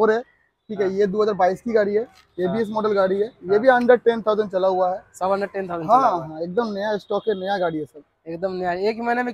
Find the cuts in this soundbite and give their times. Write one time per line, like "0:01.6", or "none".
none